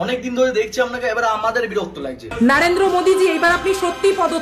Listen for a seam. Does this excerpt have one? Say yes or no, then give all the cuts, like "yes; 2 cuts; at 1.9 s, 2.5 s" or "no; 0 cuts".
yes; 1 cut; at 2.3 s